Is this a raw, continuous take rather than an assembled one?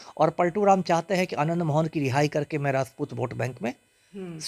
yes; 0 cuts

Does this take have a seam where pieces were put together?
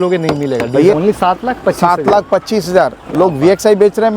yes; 1 cut; at 0.9 s

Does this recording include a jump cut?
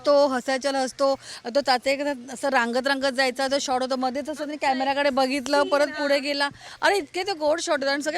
no; 0 cuts

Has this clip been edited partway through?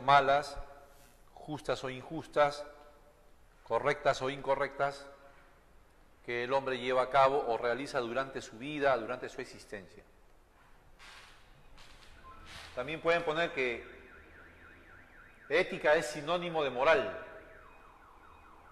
no; 0 cuts

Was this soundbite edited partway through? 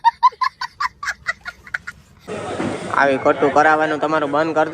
yes; 1 cut; at 2.1 s

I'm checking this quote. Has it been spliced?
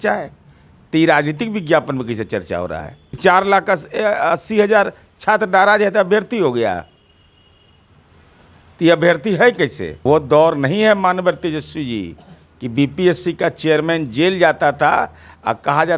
yes; 2 cuts; at 3.0 s, 9.9 s

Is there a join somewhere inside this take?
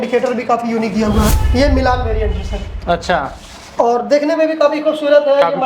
yes; 1 cut; at 1.4 s

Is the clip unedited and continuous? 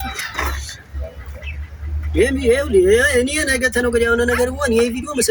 yes; 0 cuts

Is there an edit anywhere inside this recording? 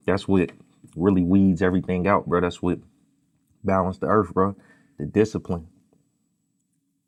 no; 0 cuts

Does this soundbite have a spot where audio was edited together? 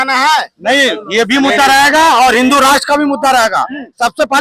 no; 0 cuts

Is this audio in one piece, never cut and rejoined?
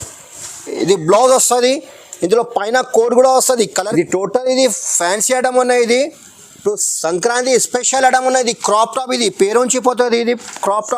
no; 1 cut; at 3.7 s

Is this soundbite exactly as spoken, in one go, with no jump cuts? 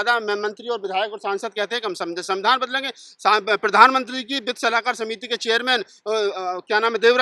yes; 0 cuts

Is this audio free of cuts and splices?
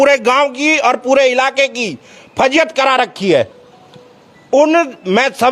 yes; 0 cuts

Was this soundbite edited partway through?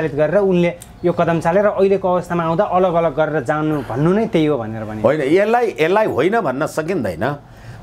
no; 0 cuts

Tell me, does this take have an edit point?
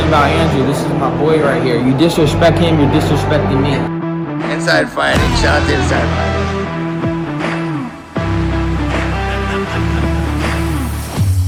no; 0 cuts

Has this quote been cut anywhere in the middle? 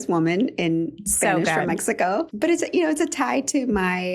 yes; 1 cut; at 2.3 s

